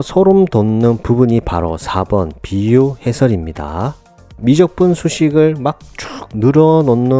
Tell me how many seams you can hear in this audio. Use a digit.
1